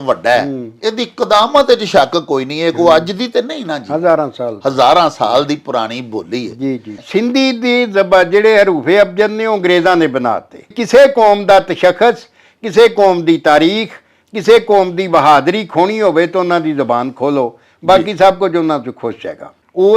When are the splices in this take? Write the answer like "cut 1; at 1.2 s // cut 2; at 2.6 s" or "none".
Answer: cut 1; at 7.0 s // cut 2; at 10.8 s